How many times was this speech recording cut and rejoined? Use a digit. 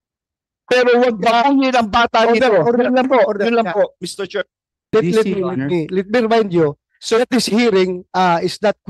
1